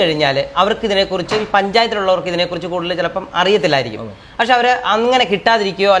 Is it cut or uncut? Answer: uncut